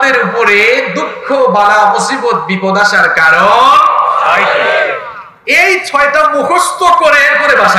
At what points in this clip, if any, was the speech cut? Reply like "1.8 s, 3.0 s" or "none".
none